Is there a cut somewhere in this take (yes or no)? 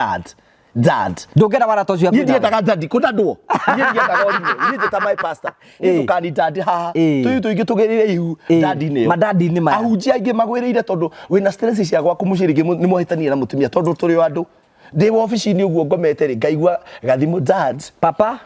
no